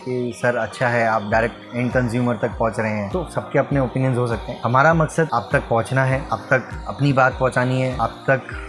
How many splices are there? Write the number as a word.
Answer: five